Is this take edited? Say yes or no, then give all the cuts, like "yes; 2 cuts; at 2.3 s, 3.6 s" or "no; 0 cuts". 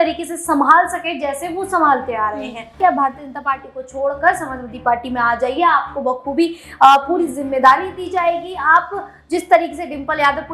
yes; 1 cut; at 2.7 s